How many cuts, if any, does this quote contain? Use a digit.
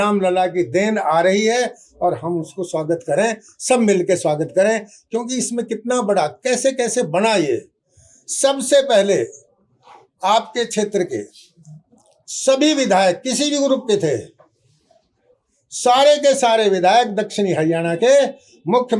0